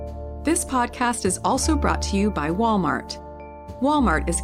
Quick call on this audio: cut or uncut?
uncut